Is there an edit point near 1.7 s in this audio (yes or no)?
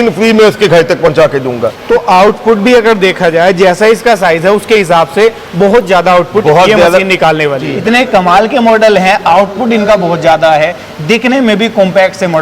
yes